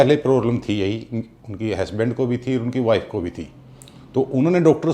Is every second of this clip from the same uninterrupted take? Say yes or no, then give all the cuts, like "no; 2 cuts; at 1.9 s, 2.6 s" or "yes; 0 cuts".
yes; 0 cuts